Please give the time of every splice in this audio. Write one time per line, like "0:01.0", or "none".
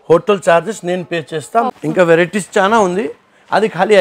0:01.6

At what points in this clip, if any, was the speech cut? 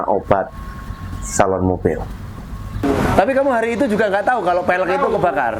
0:02.8

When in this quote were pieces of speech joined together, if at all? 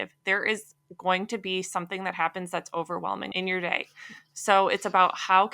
0:03.3

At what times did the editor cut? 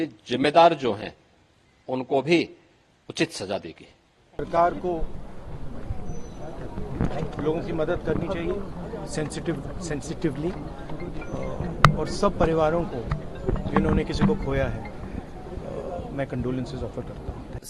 none

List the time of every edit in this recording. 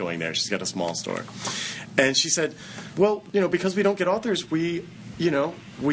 0:03.1

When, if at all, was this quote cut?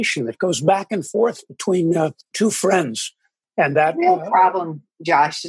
0:02.2
0:03.5

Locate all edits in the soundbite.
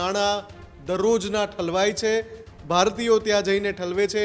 none

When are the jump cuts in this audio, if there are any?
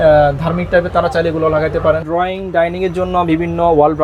0:02.0

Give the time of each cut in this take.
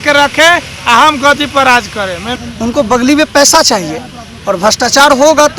0:02.4

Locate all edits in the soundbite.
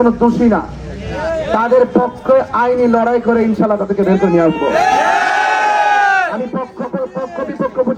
none

